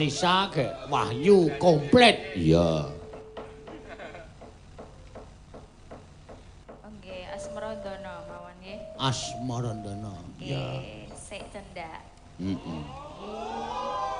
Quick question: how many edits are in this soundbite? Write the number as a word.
zero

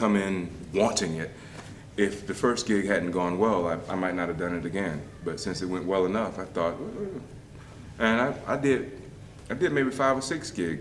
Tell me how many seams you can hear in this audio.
one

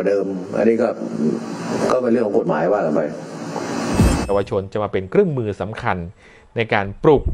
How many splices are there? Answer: one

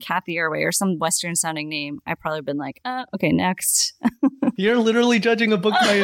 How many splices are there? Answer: zero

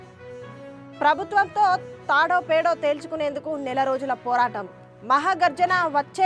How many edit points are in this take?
zero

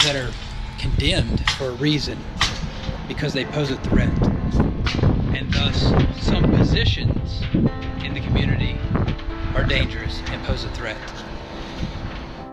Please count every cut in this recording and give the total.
zero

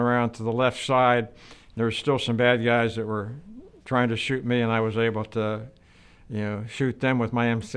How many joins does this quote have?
zero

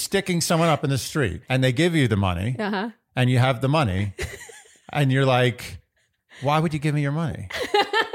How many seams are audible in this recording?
one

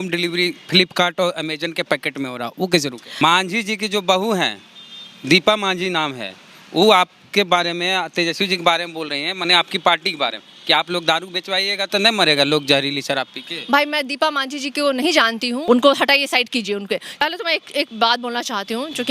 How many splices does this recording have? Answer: three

